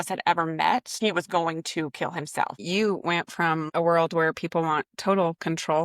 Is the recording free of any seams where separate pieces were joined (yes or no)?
no